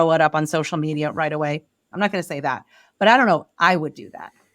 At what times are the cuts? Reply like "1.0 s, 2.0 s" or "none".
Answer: 1.9 s